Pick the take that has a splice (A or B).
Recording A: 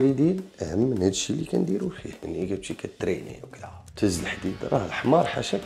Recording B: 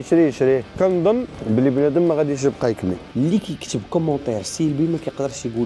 B